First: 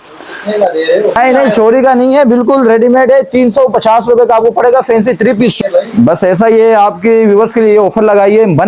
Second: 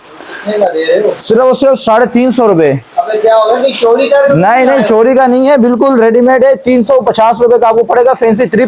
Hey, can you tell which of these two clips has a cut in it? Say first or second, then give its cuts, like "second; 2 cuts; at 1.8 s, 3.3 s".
first; 2 cuts; at 1.2 s, 5.6 s